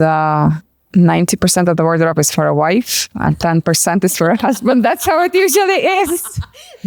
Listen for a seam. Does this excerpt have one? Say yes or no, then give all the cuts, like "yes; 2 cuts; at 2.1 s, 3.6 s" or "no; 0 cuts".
no; 0 cuts